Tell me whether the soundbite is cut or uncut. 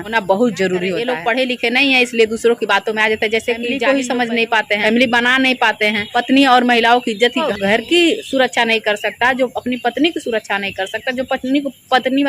cut